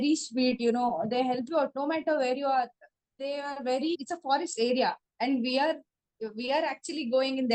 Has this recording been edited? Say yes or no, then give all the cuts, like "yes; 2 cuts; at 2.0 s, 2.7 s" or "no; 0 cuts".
yes; 1 cut; at 4.0 s